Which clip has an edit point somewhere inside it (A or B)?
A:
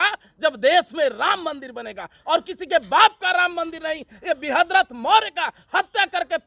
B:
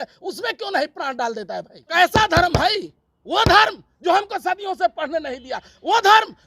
B